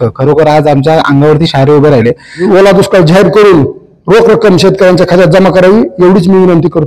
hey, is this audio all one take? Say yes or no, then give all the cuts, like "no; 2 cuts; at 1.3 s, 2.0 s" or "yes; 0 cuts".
no; 1 cut; at 2.3 s